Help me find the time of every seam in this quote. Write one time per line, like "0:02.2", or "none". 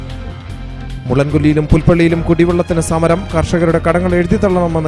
0:00.9